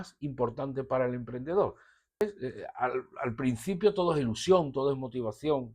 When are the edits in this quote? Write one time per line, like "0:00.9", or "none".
0:02.2